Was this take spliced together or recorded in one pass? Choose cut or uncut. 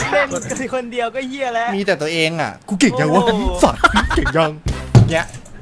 uncut